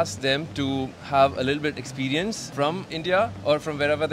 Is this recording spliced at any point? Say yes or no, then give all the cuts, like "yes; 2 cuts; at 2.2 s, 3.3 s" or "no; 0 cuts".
yes; 1 cut; at 2.9 s